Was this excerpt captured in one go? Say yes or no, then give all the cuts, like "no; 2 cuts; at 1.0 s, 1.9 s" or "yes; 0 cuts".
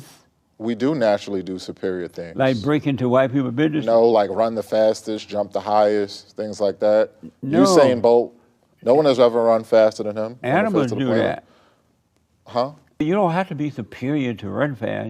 no; 1 cut; at 13.0 s